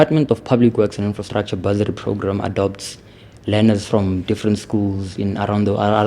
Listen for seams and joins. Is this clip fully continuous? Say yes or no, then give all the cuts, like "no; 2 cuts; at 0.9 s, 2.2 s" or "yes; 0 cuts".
yes; 0 cuts